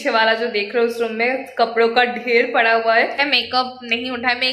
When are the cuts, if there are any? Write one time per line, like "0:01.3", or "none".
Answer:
0:03.2

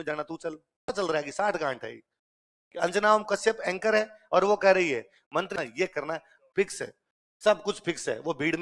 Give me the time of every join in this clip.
0:00.9
0:05.5

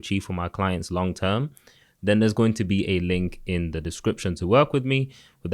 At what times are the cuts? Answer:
none

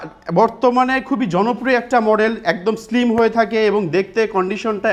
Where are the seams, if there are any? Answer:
none

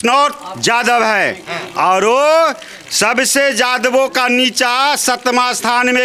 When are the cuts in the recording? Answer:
none

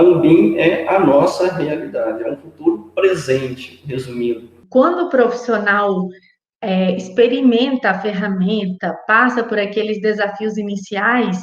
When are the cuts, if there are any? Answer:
0:04.6

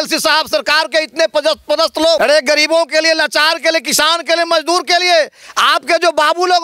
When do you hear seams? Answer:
0:02.2

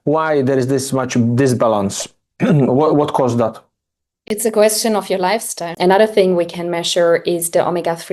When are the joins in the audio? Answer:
0:05.7

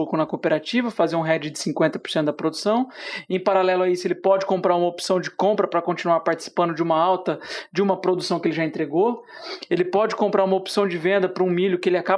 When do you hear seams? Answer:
none

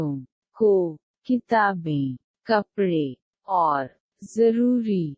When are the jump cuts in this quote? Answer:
0:01.0

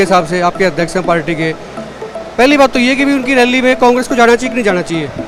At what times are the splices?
none

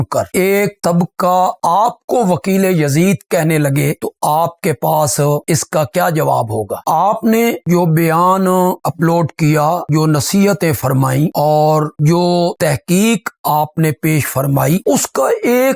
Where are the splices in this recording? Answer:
none

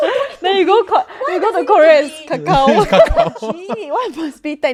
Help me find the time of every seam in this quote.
none

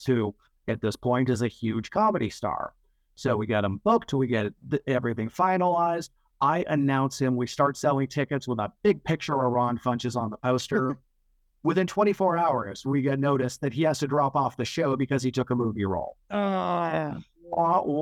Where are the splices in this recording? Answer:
none

